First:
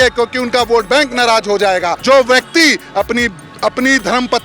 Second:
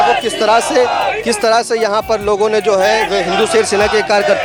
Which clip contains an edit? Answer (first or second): first